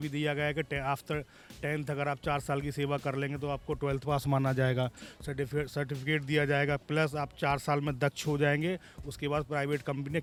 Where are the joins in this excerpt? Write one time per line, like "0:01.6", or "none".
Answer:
none

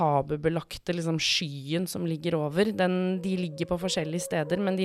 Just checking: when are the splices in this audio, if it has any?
none

